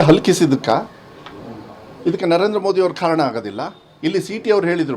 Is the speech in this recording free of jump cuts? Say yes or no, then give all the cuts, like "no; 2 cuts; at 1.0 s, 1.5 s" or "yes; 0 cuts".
yes; 0 cuts